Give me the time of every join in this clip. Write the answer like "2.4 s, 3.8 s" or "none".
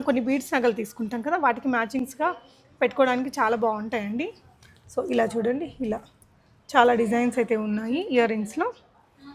none